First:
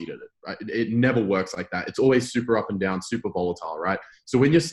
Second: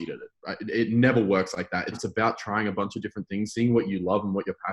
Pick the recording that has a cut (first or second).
second